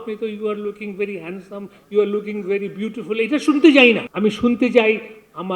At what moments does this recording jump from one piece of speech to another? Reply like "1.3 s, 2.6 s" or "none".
4.1 s